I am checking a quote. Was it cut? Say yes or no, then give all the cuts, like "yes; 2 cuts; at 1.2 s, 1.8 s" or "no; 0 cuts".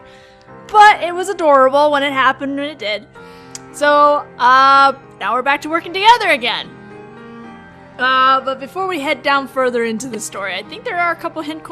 no; 0 cuts